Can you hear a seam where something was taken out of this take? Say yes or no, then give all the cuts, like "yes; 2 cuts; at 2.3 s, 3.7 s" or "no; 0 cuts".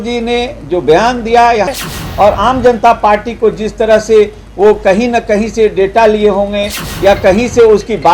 yes; 1 cut; at 1.7 s